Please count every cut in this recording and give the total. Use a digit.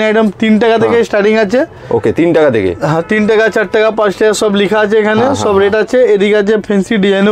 0